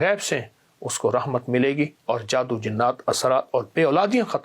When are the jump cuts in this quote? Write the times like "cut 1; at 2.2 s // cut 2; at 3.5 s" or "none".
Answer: cut 1; at 2.0 s